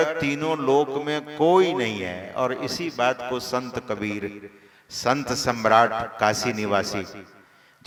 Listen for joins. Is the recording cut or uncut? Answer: uncut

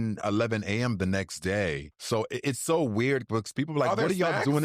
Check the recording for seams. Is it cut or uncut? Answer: cut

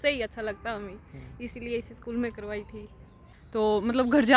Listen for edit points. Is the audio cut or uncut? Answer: cut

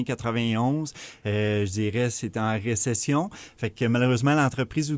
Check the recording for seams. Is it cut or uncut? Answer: uncut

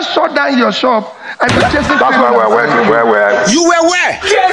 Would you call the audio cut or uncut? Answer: cut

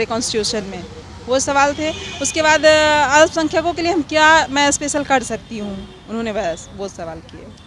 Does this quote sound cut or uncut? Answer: uncut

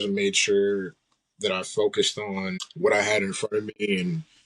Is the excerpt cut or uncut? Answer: cut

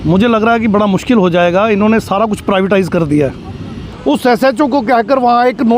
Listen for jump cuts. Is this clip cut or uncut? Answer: cut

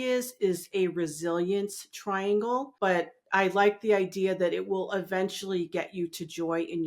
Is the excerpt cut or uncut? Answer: cut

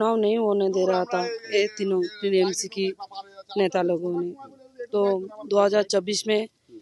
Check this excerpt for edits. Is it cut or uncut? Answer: uncut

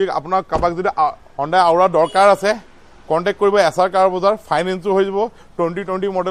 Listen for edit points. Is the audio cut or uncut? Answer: uncut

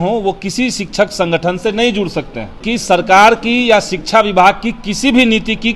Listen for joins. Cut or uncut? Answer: cut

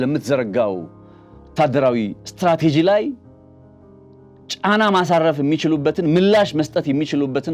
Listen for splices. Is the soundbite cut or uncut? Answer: uncut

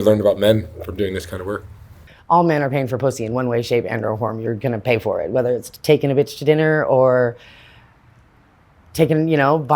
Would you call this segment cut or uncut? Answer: cut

